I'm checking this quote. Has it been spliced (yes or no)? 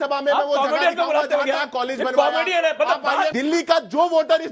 yes